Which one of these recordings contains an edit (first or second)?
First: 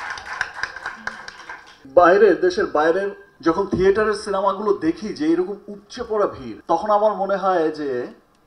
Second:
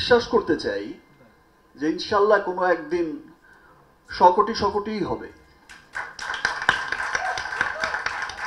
first